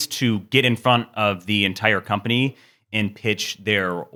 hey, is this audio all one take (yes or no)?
yes